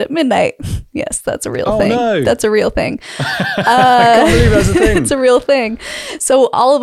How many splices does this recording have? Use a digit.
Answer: 0